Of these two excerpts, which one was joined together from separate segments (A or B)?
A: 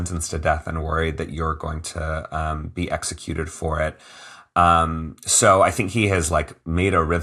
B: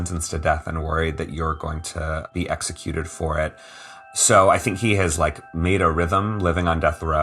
B